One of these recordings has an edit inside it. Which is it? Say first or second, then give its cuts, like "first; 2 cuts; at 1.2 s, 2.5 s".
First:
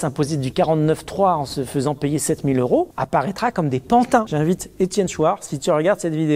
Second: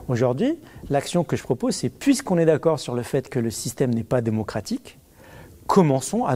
first; 2 cuts; at 3.0 s, 4.3 s